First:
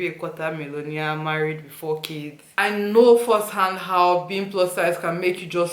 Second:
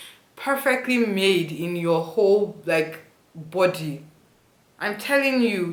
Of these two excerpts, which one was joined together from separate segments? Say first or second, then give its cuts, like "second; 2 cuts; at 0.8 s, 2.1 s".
first; 1 cut; at 2.6 s